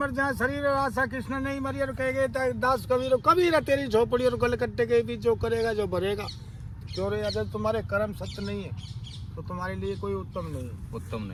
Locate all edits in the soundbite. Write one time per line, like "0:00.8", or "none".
none